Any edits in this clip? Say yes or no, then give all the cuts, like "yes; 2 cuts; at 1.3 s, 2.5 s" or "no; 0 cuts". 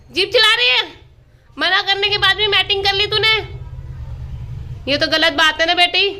no; 0 cuts